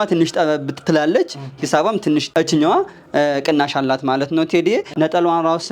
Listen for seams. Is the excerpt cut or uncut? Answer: cut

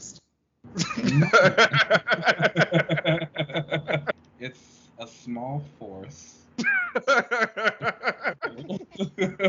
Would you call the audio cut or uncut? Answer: cut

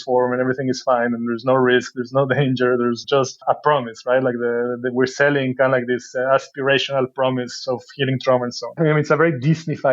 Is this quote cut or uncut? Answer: cut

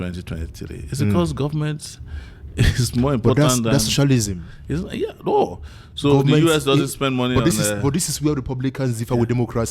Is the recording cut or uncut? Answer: uncut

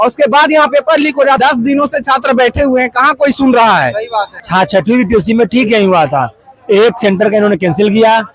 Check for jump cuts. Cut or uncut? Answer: cut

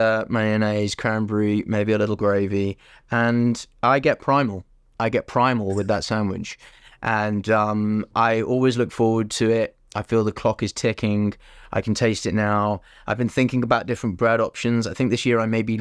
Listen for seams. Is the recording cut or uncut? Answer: uncut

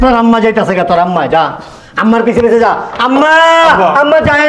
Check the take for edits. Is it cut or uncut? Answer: uncut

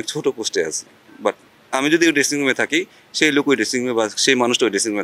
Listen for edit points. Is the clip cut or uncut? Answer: uncut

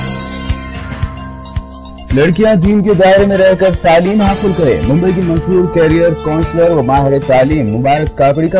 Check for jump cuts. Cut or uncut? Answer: cut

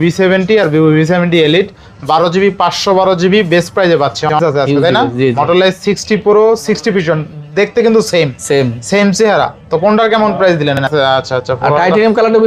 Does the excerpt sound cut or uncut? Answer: cut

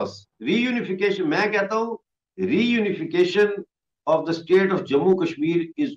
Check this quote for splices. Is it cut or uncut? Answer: uncut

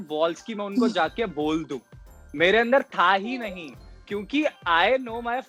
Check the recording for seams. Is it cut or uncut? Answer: uncut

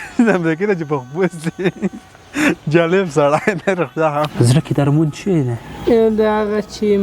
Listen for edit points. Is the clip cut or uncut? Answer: cut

